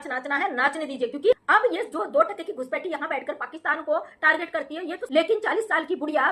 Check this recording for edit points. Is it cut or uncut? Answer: cut